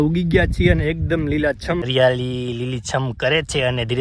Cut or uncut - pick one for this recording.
cut